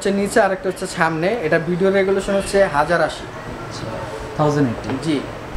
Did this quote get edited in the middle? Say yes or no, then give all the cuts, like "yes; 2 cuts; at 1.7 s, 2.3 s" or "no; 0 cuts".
no; 0 cuts